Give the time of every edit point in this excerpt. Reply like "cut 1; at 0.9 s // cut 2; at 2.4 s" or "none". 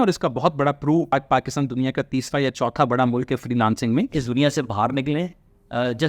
cut 1; at 1.1 s // cut 2; at 4.2 s